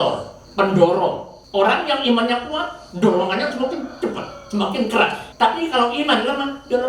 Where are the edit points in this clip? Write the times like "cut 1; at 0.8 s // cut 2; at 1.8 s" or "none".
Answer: cut 1; at 1.3 s // cut 2; at 5.2 s